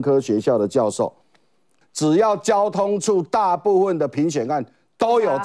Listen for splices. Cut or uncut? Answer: cut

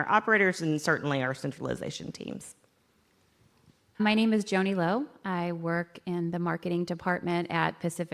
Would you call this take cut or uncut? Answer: uncut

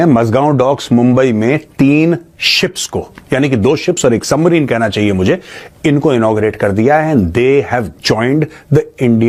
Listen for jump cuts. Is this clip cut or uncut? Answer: uncut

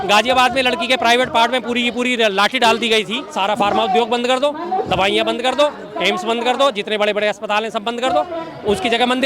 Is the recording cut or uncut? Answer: cut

